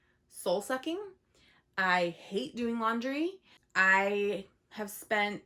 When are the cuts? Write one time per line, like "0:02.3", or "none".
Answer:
0:03.6